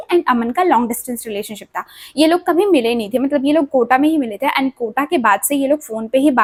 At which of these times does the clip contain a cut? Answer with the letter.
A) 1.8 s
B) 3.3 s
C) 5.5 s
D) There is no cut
D